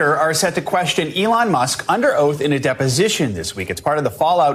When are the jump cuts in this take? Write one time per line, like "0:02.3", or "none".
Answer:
none